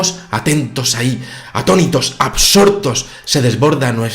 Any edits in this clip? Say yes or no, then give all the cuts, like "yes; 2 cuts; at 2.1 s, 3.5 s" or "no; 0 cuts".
yes; 1 cut; at 1.3 s